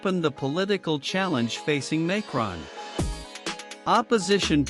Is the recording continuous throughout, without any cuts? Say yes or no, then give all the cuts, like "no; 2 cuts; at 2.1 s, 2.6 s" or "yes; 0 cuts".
no; 2 cuts; at 2.7 s, 3.8 s